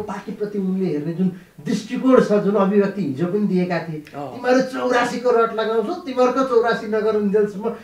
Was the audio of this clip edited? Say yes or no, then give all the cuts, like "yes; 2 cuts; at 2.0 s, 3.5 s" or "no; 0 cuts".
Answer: no; 0 cuts